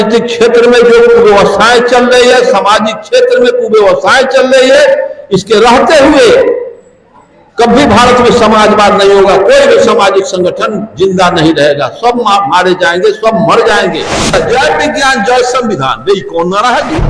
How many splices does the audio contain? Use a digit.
1